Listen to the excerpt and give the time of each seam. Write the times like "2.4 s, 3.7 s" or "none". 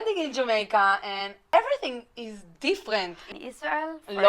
1.4 s, 3.3 s